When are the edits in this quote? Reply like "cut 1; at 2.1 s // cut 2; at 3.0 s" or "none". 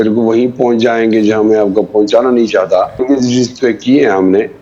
cut 1; at 3.0 s